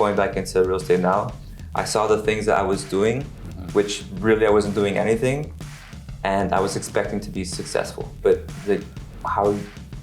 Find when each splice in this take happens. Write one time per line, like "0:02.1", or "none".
0:08.2